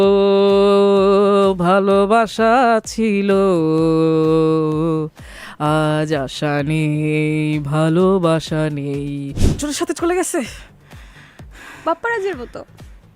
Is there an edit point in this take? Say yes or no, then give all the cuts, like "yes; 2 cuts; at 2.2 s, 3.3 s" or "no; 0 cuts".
yes; 1 cut; at 9.4 s